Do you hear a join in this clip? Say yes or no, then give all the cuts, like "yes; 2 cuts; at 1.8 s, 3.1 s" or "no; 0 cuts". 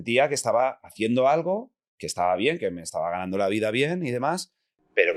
no; 0 cuts